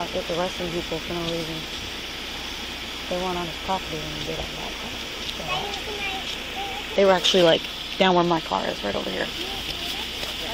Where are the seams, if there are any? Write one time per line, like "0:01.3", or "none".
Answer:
none